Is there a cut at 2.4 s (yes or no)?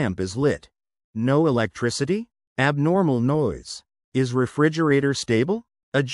yes